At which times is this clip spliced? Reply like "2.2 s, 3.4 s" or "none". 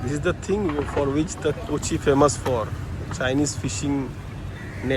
none